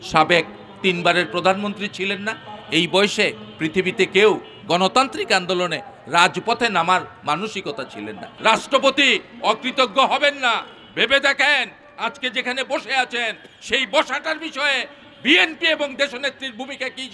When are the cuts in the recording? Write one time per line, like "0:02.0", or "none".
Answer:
0:08.3